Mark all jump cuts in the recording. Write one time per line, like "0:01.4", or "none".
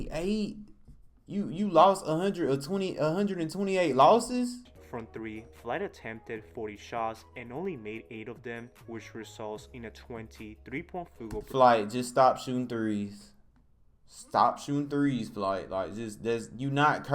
0:04.7